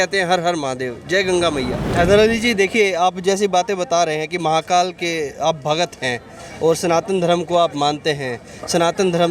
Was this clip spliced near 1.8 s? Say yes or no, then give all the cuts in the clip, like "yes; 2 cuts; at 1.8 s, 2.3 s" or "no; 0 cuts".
yes; 1 cut; at 1.8 s